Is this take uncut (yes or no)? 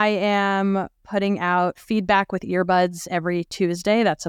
yes